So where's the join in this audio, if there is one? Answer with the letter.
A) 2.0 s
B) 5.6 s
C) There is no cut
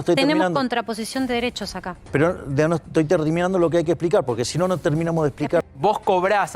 B